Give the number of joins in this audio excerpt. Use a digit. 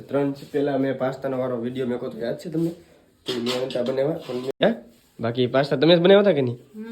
1